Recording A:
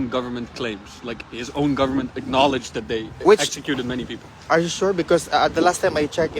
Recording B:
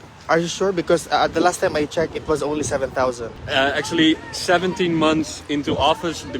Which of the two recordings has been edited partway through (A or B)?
B